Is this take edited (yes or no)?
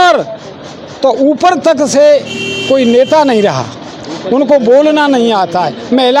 no